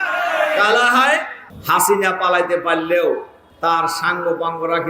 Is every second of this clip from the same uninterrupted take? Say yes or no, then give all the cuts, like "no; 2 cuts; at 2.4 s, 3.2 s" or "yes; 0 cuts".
no; 1 cut; at 1.4 s